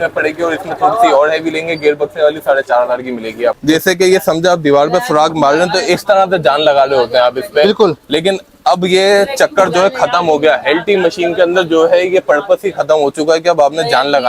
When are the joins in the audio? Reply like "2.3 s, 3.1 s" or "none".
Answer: 3.6 s